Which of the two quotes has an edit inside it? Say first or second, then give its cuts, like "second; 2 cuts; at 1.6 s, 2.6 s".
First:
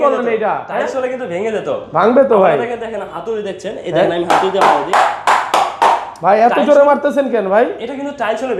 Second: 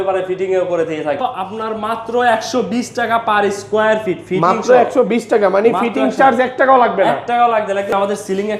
second; 2 cuts; at 1.3 s, 7.9 s